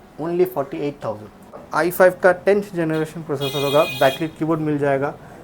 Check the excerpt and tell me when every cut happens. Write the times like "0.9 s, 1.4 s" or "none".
1.7 s